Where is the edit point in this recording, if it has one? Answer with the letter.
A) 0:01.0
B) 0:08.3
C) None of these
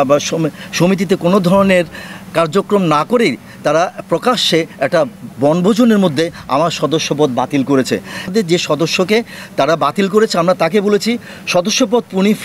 B